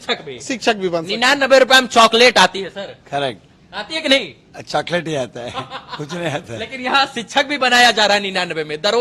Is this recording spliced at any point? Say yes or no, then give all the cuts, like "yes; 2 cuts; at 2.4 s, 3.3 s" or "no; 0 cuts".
no; 0 cuts